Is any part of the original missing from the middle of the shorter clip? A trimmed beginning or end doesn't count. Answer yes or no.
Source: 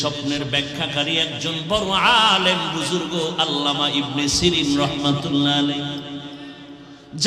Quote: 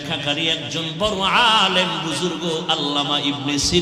no